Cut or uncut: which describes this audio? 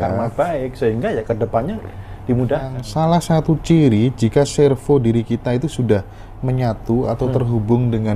cut